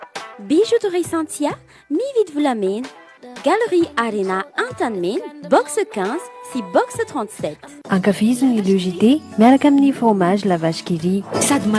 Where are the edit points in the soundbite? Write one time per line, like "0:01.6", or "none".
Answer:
none